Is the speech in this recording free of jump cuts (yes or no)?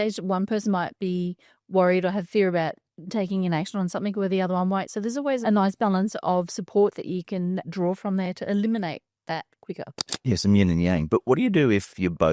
yes